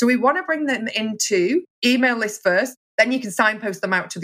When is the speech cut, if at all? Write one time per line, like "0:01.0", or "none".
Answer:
0:01.7